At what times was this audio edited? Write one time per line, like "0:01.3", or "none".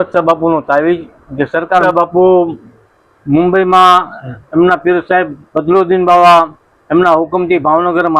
0:01.8